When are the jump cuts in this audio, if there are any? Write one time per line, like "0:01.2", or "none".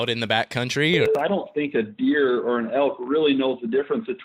0:01.1